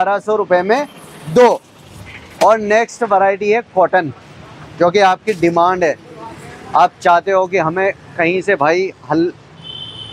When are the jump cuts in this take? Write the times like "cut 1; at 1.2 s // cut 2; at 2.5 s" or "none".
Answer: none